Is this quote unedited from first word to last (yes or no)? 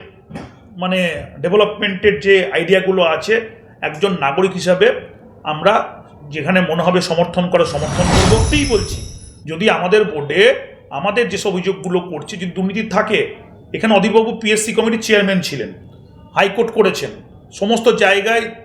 no